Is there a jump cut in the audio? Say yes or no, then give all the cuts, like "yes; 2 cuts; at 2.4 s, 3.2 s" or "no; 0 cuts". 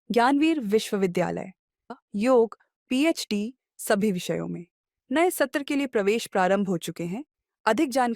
yes; 1 cut; at 1.9 s